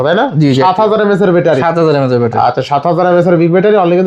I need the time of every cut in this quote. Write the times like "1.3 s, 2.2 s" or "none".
none